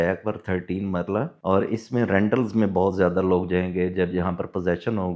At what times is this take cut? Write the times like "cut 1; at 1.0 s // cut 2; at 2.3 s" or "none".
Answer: cut 1; at 1.4 s